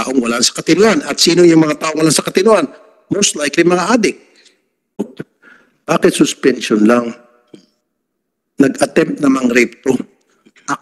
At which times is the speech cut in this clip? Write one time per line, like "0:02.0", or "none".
0:05.1